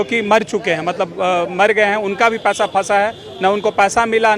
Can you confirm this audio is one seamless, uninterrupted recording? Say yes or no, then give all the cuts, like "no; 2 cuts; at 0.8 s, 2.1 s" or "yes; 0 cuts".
yes; 0 cuts